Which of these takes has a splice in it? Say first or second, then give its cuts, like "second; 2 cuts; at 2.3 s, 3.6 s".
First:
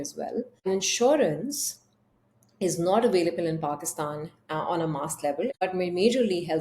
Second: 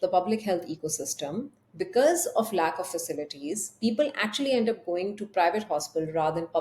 first; 1 cut; at 5.5 s